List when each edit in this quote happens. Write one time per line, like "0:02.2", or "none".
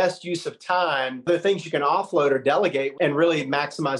0:01.3
0:02.9